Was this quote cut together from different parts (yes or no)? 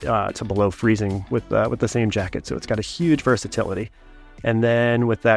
no